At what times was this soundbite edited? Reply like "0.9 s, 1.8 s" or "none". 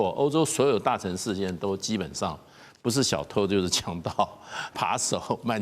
4.7 s